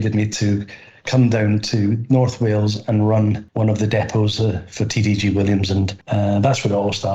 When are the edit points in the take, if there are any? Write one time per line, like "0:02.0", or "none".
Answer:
0:03.5
0:06.0